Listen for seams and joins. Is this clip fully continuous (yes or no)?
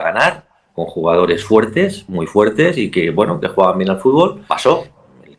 no